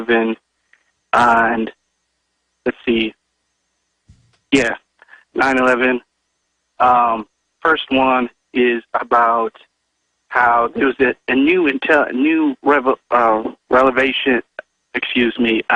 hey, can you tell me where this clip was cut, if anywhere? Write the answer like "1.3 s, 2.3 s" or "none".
5.3 s